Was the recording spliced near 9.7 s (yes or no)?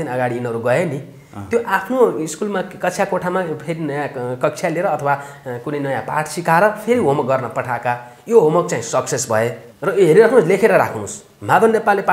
yes